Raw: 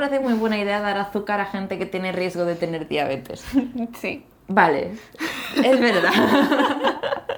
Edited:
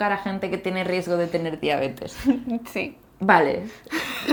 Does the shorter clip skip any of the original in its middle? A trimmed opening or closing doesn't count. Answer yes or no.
no